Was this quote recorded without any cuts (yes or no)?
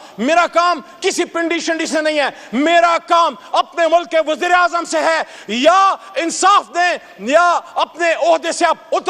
yes